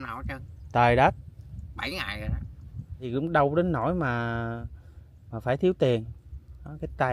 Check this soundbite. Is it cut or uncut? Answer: cut